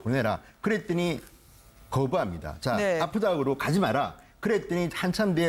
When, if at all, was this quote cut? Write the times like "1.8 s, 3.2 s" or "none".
4.5 s